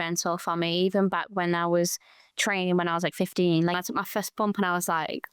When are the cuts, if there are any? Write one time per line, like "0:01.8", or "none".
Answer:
0:03.8